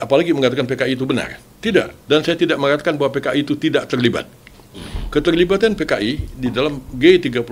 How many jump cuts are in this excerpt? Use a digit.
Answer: 1